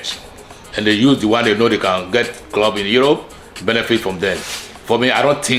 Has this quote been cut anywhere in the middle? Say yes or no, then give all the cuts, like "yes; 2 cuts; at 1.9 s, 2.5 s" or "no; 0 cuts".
no; 0 cuts